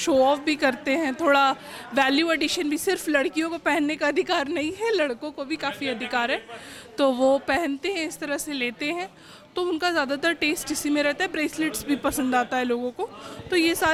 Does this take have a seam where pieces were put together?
no; 0 cuts

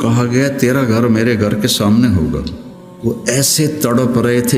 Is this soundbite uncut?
no; 1 cut; at 2.9 s

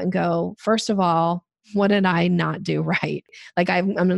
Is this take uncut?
no; 2 cuts; at 1.5 s, 3.3 s

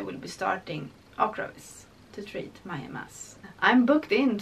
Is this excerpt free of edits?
no; 1 cut; at 3.4 s

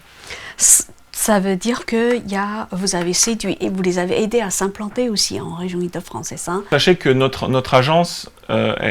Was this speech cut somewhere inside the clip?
yes; 1 cut; at 6.6 s

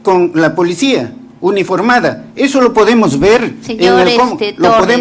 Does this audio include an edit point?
no; 0 cuts

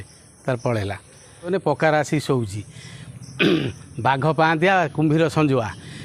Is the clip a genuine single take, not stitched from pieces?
no; 1 cut; at 1.5 s

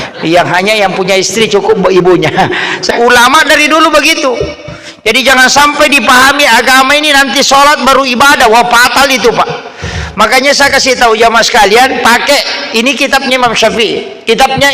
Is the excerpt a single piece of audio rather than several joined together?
no; 1 cut; at 2.9 s

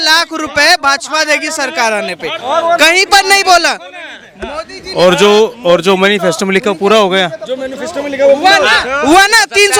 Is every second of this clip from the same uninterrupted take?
yes; 0 cuts

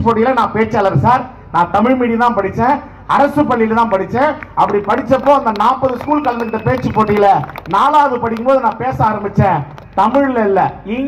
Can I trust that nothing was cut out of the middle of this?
yes; 0 cuts

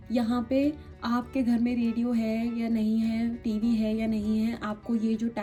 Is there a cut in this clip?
no; 0 cuts

